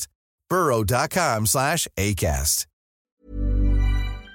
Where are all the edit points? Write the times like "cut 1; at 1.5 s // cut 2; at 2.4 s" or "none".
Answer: cut 1; at 3.2 s